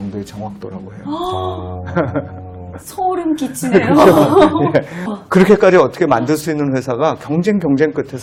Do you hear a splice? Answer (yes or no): no